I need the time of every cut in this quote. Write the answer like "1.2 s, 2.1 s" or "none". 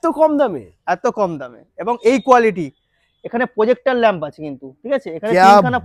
none